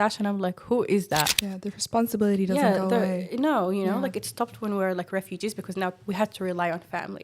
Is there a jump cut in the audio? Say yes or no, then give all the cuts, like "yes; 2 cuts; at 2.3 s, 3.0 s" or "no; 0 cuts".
yes; 1 cut; at 1.3 s